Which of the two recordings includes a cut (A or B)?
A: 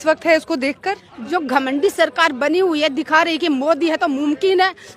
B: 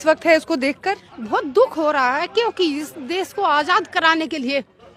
A